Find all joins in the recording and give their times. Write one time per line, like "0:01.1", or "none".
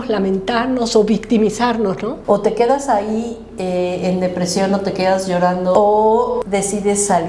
0:02.1
0:05.7
0:06.4